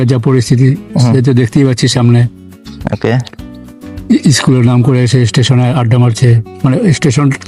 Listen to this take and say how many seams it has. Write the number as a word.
zero